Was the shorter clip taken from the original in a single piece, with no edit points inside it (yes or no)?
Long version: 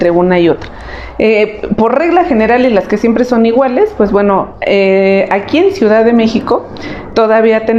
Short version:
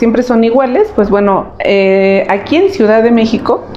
yes